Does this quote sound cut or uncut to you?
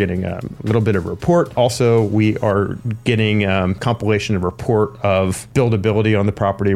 cut